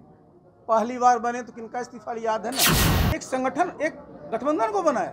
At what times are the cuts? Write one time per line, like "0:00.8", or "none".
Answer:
0:02.9